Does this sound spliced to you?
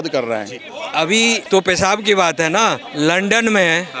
yes; 2 cuts; at 0.9 s, 2.8 s

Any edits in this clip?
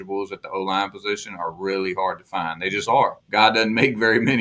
yes; 1 cut; at 3.2 s

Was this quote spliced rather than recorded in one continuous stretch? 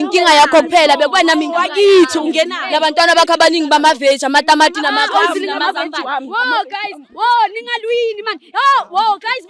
no; 0 cuts

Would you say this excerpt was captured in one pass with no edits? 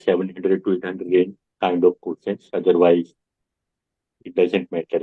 yes; 0 cuts

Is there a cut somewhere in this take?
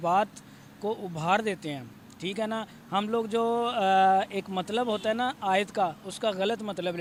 no; 0 cuts

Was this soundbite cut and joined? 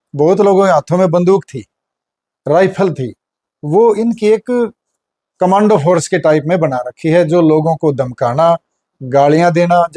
no; 0 cuts

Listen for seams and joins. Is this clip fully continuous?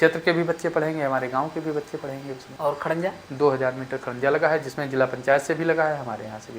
no; 1 cut; at 2.5 s

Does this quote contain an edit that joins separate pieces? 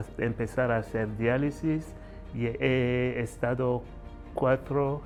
no; 0 cuts

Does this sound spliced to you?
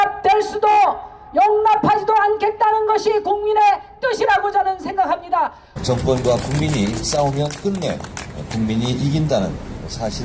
no; 0 cuts

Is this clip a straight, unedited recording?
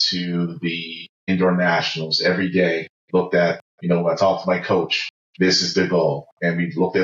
no; 2 cuts; at 1.3 s, 3.7 s

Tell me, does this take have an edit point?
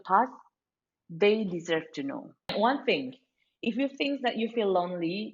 yes; 1 cut; at 2.5 s

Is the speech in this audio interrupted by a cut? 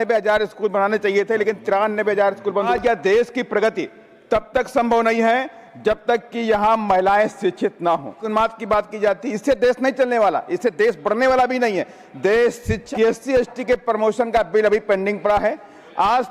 yes; 3 cuts; at 2.7 s, 8.2 s, 12.8 s

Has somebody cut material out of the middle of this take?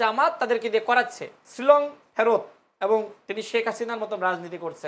yes; 1 cut; at 1.4 s

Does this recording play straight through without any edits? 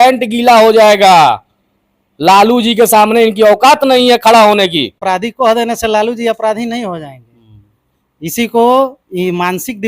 no; 1 cut; at 5.0 s

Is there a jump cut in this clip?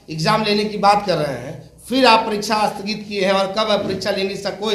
no; 0 cuts

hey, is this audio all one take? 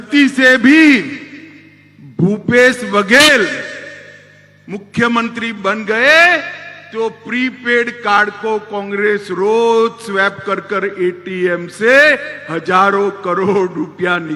yes; 0 cuts

